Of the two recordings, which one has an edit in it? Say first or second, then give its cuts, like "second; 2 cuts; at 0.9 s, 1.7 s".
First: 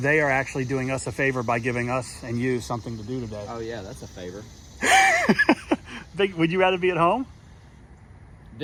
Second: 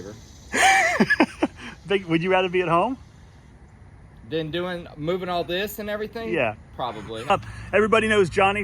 second; 1 cut; at 7.3 s